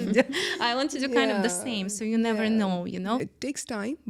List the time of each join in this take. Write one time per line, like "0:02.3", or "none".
0:03.2